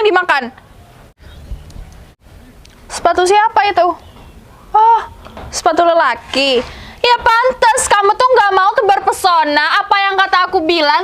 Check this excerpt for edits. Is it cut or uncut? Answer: cut